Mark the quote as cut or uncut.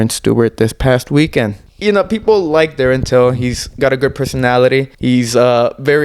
cut